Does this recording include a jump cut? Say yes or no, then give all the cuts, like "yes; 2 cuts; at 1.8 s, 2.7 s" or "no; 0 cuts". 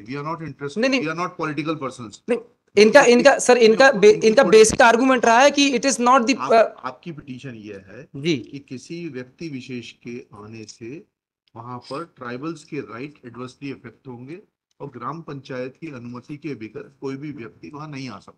no; 0 cuts